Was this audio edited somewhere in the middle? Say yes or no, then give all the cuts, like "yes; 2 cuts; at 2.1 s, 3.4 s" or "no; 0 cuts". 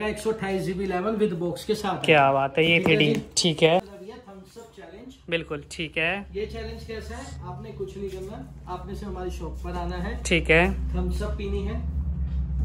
yes; 1 cut; at 4.0 s